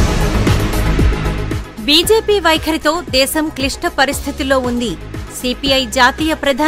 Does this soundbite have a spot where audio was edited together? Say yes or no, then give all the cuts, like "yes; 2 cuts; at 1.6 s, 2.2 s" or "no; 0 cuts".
yes; 1 cut; at 0.9 s